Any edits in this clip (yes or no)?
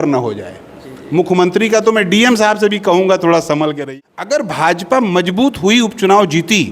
yes